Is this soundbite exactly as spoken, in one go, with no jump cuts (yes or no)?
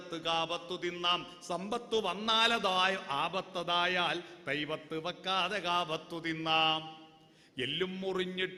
yes